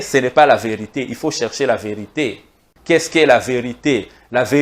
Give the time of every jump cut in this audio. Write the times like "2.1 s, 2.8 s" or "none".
2.7 s